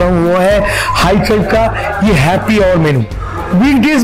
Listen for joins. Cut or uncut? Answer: uncut